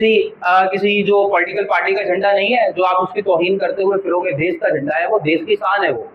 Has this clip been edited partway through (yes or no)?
no